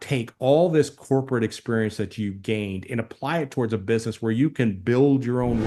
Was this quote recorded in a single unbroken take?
yes; 0 cuts

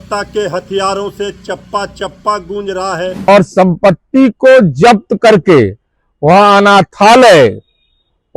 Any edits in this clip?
yes; 1 cut; at 3.3 s

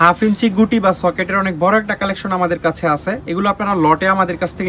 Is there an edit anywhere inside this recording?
no; 0 cuts

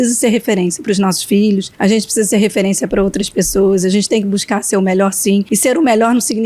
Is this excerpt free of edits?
no; 2 cuts; at 1.7 s, 5.5 s

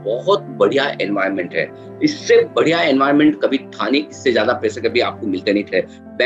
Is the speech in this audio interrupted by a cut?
no; 0 cuts

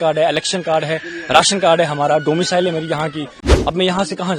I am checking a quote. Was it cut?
yes; 1 cut; at 3.4 s

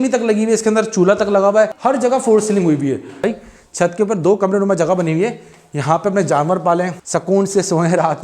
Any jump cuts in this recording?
yes; 3 cuts; at 1.8 s, 3.2 s, 7.0 s

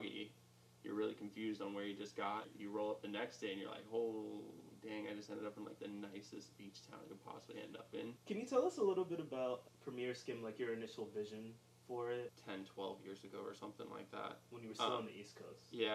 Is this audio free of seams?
no; 4 cuts; at 2.5 s, 8.2 s, 9.7 s, 12.4 s

